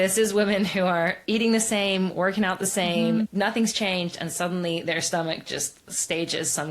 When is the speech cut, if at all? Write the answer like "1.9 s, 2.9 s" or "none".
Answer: 3.3 s